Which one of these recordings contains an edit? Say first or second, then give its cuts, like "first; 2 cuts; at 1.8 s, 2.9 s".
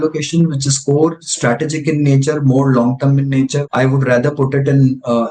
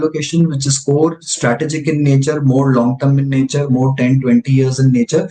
first; 1 cut; at 3.6 s